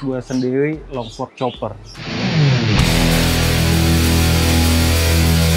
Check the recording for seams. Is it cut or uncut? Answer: uncut